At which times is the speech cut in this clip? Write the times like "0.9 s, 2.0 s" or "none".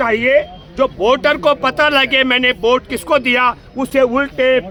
none